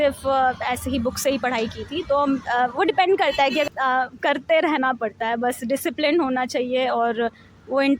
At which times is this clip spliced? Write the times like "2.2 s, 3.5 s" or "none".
3.7 s